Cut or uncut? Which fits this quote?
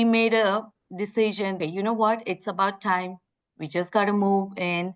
cut